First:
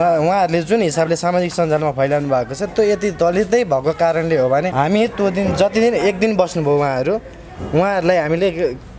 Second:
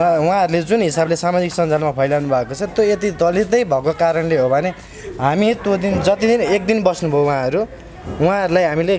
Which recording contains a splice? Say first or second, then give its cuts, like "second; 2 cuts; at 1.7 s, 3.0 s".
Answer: first; 1 cut; at 4.7 s